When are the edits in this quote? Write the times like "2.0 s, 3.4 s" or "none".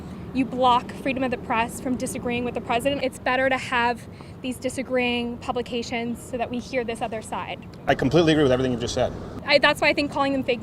3.0 s, 9.3 s